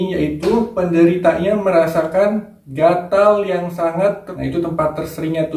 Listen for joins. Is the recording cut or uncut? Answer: cut